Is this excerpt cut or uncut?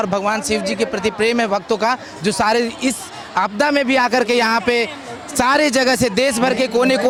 uncut